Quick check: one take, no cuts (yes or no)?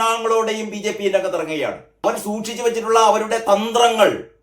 no